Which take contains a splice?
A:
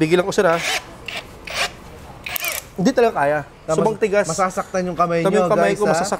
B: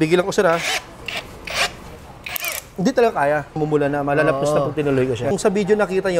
B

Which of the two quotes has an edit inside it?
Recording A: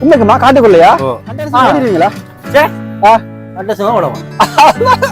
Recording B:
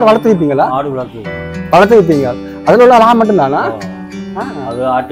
A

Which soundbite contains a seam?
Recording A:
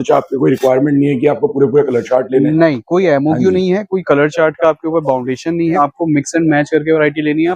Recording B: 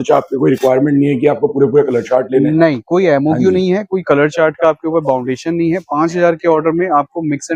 A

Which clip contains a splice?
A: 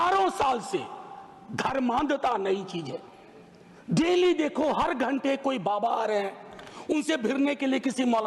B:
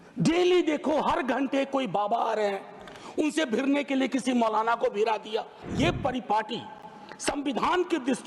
B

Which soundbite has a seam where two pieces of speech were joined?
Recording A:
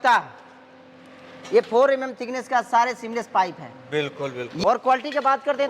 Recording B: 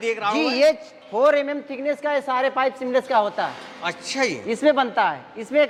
A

